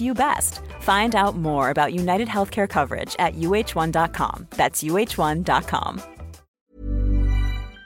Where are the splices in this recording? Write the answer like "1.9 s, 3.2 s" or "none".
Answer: 6.6 s